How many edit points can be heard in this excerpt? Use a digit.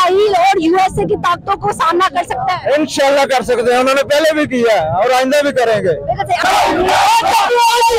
1